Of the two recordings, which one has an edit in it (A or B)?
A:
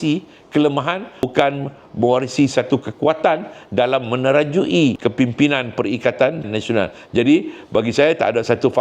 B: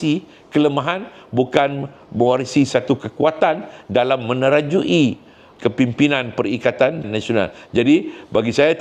A